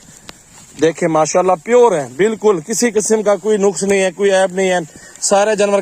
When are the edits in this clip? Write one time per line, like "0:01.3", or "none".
none